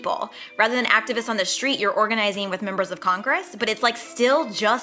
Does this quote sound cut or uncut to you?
uncut